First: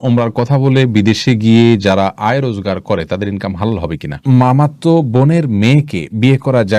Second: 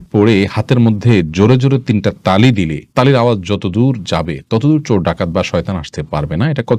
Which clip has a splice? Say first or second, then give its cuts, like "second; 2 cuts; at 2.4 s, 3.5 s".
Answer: first; 1 cut; at 4.2 s